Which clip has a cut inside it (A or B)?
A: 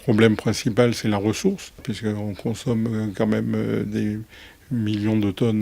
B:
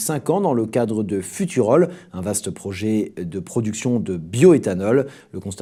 A